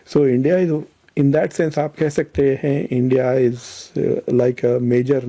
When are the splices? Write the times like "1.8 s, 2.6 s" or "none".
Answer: none

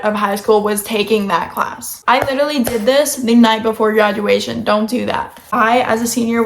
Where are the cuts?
1.9 s, 5.3 s

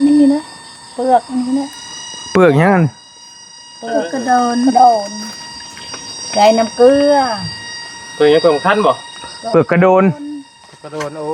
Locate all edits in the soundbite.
none

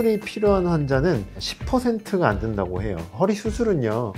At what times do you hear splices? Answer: 3.1 s

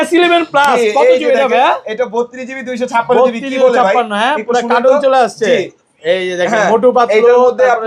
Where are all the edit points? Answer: none

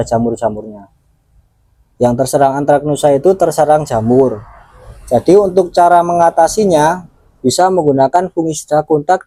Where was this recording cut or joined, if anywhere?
none

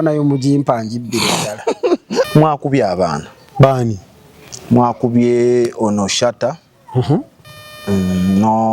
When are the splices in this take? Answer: 2.3 s

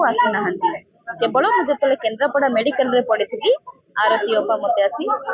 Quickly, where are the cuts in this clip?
none

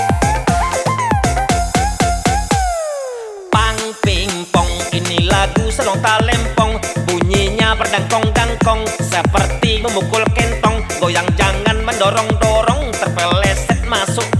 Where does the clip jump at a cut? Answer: 1.5 s

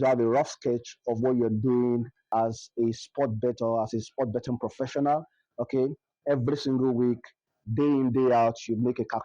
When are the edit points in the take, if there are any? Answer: 2.2 s

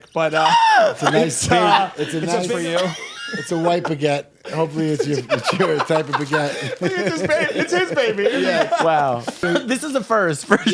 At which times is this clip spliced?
2.5 s, 9.4 s

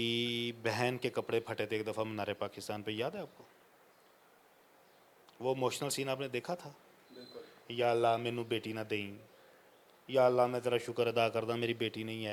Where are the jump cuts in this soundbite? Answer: none

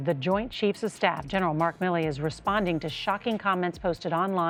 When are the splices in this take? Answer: none

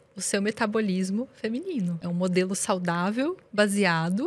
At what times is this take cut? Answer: 2.0 s

